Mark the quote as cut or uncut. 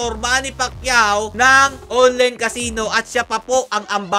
uncut